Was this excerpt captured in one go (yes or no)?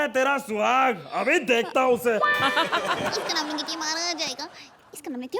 yes